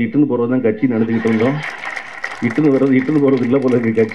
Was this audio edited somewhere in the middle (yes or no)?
no